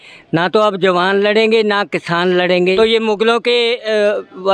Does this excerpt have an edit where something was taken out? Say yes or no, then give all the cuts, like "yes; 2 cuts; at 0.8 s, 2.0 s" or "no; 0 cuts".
yes; 1 cut; at 2.8 s